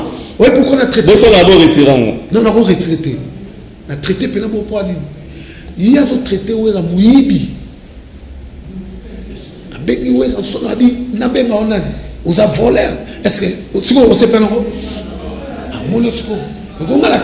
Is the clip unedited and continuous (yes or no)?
yes